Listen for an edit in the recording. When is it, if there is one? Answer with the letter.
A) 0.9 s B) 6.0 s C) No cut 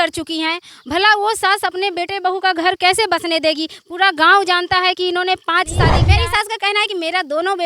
B